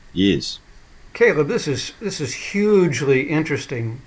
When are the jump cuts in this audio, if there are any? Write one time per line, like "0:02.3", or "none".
0:01.0